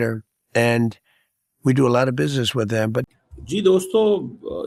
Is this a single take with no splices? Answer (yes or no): yes